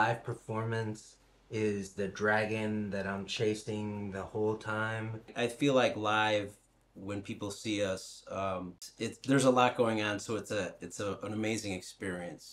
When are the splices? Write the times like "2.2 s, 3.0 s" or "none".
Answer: 5.3 s, 8.8 s

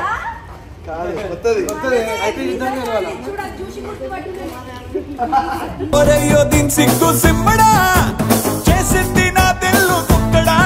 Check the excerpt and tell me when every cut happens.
none

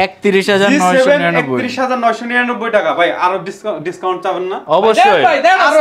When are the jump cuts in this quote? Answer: none

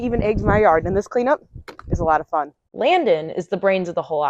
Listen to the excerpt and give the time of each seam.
none

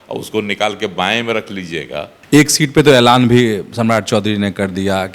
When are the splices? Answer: 2.1 s

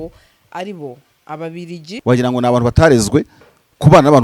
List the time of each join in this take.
1.9 s

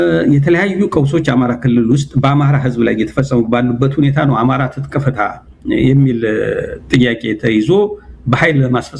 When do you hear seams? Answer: none

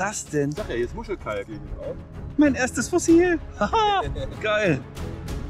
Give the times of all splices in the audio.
1.6 s

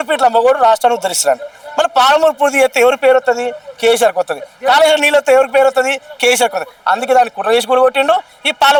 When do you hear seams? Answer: none

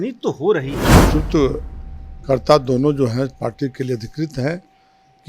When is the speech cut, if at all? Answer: 1.0 s

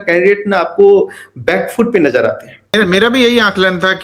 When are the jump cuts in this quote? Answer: 2.7 s

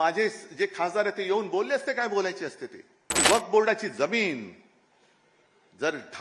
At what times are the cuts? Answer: 3.2 s

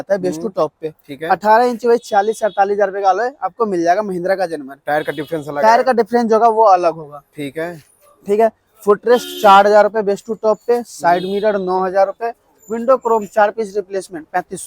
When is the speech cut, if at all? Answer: none

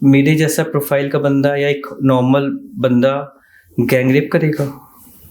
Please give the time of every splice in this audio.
none

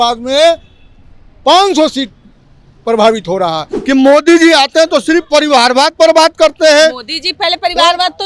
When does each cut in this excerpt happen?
3.7 s

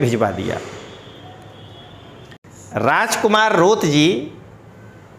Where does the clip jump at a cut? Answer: 2.4 s

